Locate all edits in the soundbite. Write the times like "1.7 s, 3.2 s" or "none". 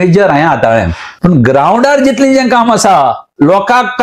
1.0 s